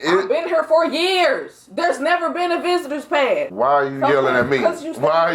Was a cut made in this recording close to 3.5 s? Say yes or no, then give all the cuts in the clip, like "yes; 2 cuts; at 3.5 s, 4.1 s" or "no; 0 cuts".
yes; 1 cut; at 3.5 s